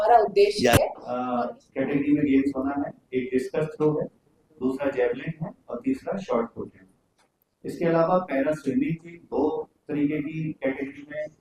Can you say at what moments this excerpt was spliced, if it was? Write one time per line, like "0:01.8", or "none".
0:01.1